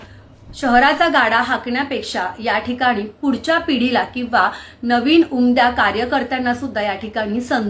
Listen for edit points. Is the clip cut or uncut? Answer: uncut